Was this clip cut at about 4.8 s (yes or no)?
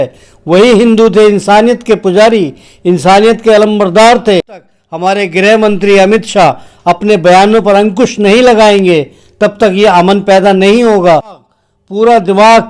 yes